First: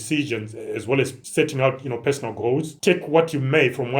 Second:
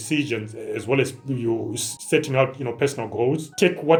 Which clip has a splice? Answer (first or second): first